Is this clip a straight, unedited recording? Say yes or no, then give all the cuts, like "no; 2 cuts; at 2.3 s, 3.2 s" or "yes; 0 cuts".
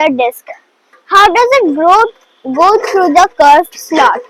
yes; 0 cuts